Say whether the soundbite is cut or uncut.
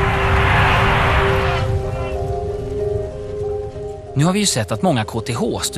uncut